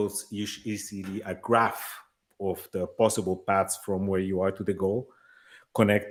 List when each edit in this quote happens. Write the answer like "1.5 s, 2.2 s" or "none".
none